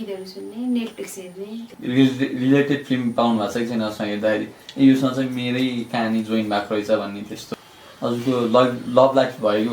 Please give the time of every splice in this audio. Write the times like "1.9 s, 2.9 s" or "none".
1.7 s, 7.4 s